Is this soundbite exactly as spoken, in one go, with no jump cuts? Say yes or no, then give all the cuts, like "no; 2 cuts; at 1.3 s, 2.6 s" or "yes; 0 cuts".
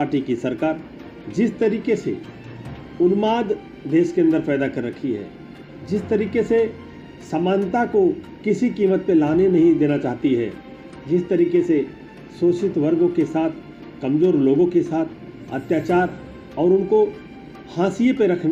yes; 0 cuts